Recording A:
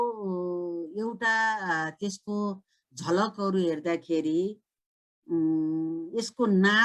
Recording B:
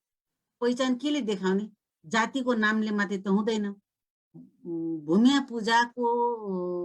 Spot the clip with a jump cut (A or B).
B